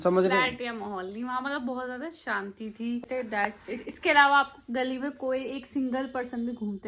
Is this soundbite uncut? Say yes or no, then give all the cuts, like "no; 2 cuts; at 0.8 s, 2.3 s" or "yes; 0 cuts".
no; 1 cut; at 3.0 s